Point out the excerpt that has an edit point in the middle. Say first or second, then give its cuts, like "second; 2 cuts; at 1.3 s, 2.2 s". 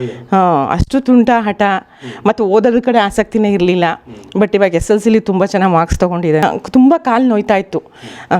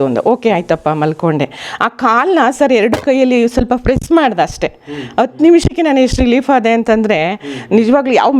first; 1 cut; at 6.4 s